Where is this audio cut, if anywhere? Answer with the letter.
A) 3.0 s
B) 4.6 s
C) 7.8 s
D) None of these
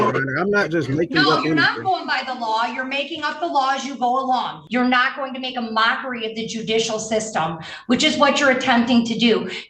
B